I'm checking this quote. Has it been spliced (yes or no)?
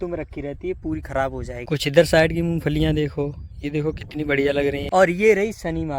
yes